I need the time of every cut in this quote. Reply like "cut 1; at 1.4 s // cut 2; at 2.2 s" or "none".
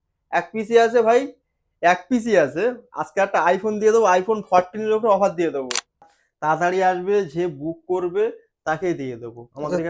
cut 1; at 6.1 s